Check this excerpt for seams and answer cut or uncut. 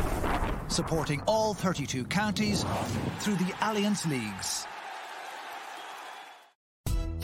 uncut